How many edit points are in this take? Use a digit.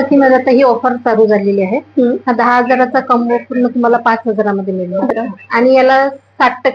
1